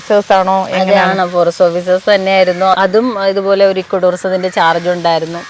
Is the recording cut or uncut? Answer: uncut